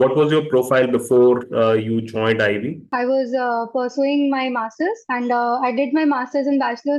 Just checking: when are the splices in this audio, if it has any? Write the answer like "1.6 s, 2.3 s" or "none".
none